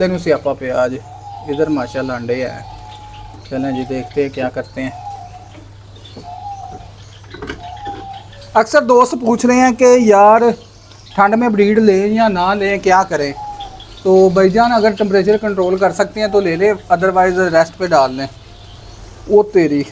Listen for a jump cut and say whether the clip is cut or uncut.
uncut